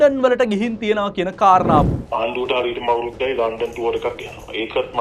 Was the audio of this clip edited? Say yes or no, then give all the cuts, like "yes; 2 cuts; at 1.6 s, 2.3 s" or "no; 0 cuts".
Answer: yes; 1 cut; at 1.8 s